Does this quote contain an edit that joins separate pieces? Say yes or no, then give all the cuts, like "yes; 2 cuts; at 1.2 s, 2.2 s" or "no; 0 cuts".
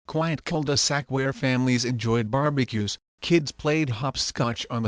no; 0 cuts